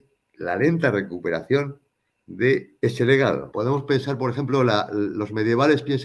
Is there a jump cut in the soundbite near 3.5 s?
yes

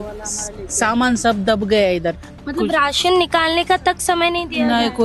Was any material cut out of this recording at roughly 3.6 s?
no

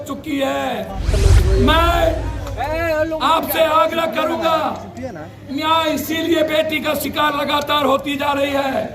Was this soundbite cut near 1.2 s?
yes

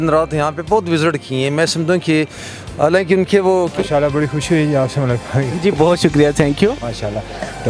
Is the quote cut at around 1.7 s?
no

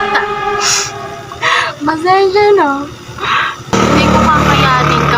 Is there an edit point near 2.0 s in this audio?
no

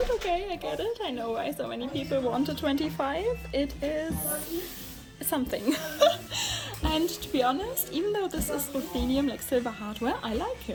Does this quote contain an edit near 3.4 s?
no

